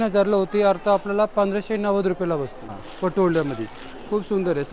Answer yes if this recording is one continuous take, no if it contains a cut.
no